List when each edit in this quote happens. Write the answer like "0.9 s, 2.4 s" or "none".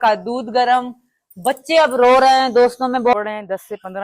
3.1 s